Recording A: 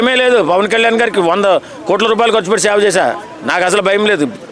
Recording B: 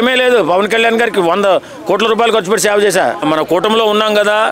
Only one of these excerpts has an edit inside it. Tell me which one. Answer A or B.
B